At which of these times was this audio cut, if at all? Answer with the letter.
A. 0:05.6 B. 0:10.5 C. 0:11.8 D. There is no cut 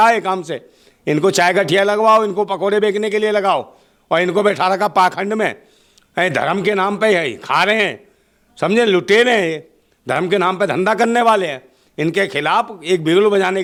D